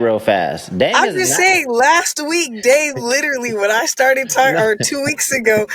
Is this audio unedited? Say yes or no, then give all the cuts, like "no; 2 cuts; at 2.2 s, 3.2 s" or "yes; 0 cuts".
yes; 0 cuts